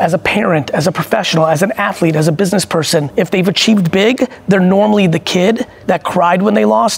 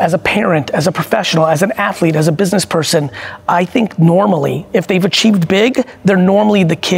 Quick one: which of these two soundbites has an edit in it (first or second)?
first